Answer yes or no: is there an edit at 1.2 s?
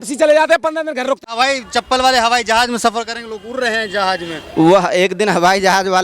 yes